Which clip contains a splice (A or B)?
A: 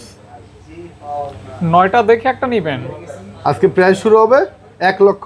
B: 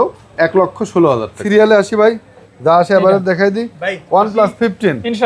B